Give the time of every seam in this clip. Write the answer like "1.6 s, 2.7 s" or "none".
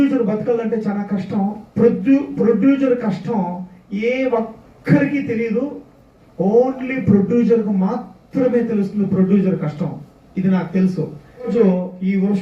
11.5 s

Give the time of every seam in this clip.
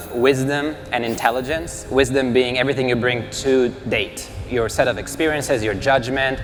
none

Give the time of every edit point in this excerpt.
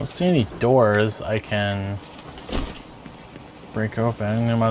none

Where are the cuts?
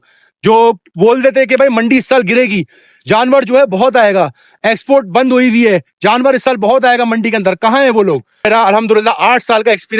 8.5 s

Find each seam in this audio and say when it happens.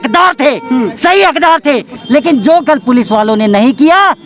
1.9 s

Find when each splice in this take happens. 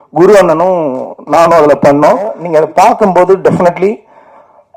2.4 s

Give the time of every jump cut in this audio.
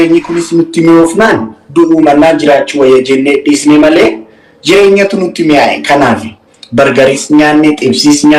none

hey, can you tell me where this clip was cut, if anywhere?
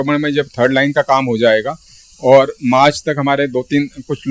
none

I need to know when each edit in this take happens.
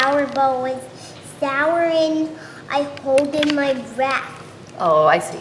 none

